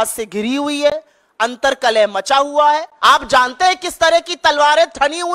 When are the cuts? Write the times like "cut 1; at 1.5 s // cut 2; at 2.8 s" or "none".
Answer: cut 1; at 2.9 s